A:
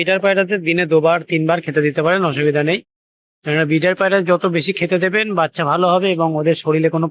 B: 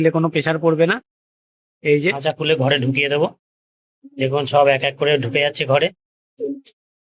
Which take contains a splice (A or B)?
B